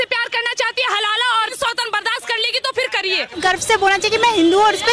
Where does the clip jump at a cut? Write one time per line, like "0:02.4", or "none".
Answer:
0:01.5
0:03.4